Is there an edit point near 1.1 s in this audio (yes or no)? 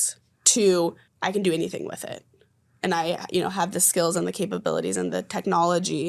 yes